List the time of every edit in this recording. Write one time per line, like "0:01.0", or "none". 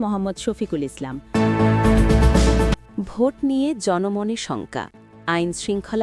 0:01.2